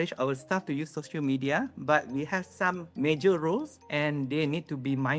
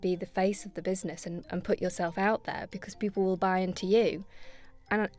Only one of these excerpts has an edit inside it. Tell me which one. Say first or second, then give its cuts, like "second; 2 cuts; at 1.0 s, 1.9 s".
first; 2 cuts; at 2.9 s, 3.8 s